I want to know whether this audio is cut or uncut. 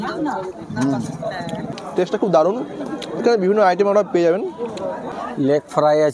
cut